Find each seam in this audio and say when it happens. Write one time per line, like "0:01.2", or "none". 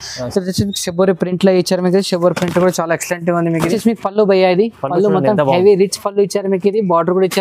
0:03.7